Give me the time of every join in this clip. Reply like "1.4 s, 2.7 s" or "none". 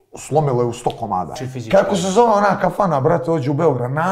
1.4 s